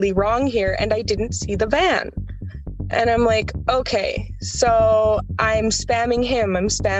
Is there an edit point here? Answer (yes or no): no